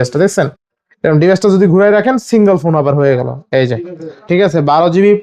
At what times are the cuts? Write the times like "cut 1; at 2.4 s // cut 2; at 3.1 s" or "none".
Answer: cut 1; at 4.2 s